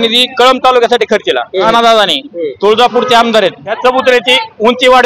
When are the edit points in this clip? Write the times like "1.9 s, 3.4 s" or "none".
1.7 s, 3.7 s